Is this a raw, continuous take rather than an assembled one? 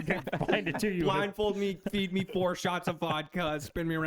yes; 0 cuts

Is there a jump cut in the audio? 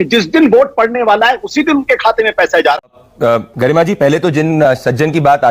yes; 1 cut; at 3.0 s

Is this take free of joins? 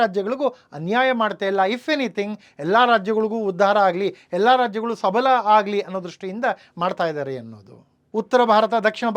no; 1 cut; at 8.0 s

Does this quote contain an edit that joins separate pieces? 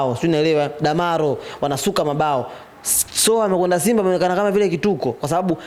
no; 0 cuts

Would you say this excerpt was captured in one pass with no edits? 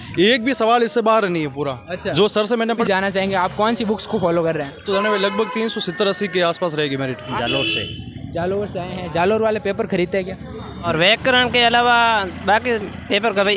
no; 4 cuts; at 2.8 s, 4.8 s, 7.3 s, 10.9 s

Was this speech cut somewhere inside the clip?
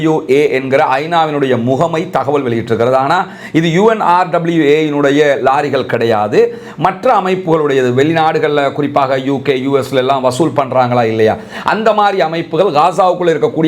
no; 0 cuts

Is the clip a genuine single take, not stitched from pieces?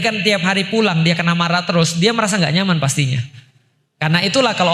yes; 0 cuts

